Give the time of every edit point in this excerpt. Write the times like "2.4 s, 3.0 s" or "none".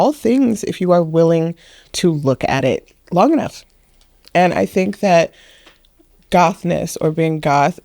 2.9 s